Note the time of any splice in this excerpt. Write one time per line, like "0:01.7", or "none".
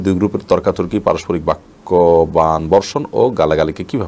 none